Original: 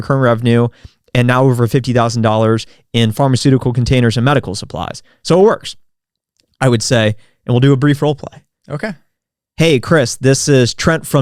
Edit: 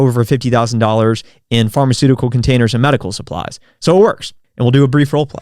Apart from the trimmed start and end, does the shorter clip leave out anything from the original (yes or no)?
yes